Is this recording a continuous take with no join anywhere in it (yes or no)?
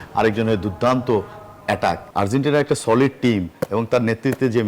no